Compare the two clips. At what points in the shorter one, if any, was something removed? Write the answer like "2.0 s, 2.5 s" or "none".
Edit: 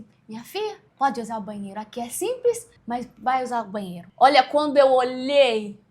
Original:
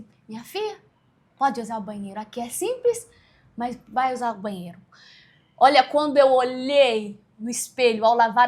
0.8 s, 2.7 s, 4.0 s